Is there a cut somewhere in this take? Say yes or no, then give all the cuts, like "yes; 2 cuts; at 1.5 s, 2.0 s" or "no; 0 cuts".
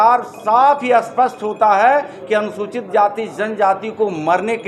no; 0 cuts